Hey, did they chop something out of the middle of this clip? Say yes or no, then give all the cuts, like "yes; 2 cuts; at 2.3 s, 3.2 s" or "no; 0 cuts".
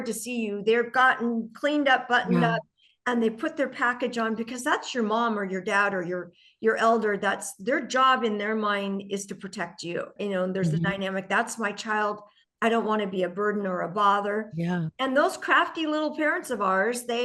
yes; 1 cut; at 10.1 s